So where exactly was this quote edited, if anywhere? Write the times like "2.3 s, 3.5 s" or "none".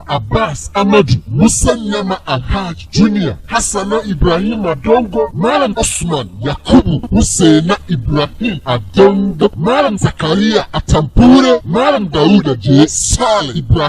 6.6 s